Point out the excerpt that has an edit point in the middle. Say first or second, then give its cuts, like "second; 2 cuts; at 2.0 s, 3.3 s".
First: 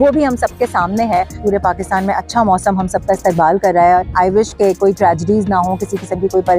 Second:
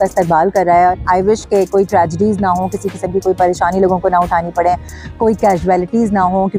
first; 1 cut; at 1.3 s